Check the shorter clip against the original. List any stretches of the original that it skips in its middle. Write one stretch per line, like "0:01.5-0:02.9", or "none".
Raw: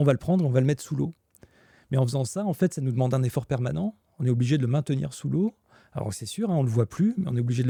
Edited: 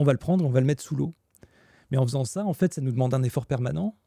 none